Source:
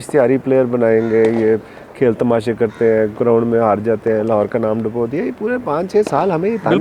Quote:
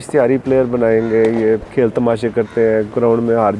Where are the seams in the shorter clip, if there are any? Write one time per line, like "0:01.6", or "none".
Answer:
0:01.7